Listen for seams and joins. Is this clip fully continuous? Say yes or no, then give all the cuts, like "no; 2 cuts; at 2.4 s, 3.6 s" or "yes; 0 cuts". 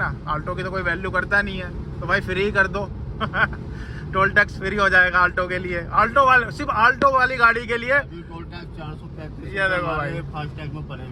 yes; 0 cuts